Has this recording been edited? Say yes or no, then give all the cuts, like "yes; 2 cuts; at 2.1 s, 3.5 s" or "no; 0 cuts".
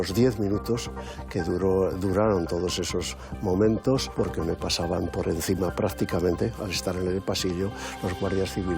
yes; 1 cut; at 4.1 s